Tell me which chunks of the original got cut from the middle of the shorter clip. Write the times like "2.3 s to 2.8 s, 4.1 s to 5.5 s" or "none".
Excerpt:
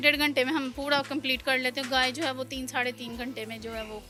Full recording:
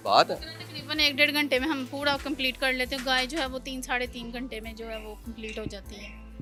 none